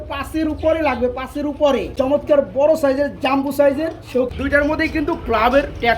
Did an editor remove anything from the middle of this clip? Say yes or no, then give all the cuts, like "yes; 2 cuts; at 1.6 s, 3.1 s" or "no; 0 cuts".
yes; 2 cuts; at 2.0 s, 4.3 s